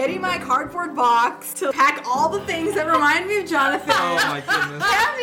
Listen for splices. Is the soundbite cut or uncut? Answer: cut